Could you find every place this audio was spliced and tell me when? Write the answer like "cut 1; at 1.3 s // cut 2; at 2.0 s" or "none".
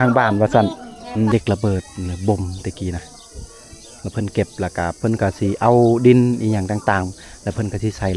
cut 1; at 1.3 s